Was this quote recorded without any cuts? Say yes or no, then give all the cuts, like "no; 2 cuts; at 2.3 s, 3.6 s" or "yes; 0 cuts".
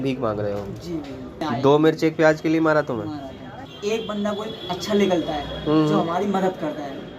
no; 2 cuts; at 1.4 s, 3.5 s